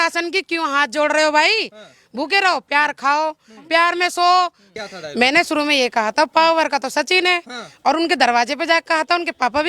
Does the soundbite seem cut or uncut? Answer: cut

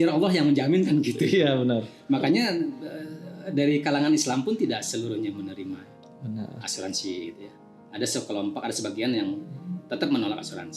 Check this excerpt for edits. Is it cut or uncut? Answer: uncut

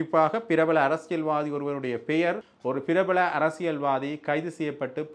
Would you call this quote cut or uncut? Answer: cut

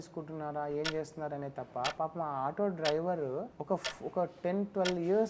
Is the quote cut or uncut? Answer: cut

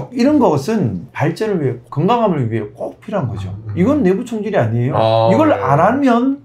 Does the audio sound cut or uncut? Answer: cut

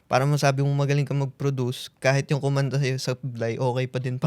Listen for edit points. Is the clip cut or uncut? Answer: uncut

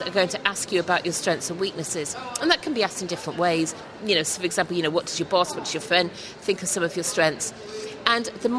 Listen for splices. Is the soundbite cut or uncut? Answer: uncut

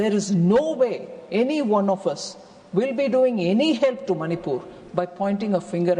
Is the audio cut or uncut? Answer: uncut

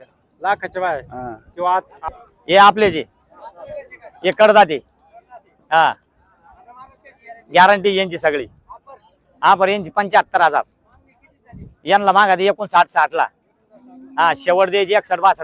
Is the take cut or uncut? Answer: cut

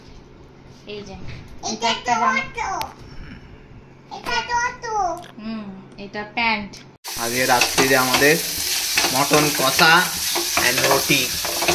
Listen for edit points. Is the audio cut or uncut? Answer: cut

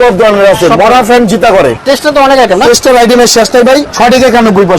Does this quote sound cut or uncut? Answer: cut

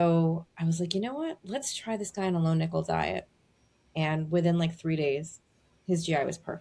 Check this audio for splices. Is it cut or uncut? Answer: uncut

